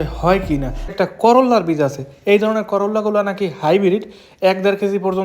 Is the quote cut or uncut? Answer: cut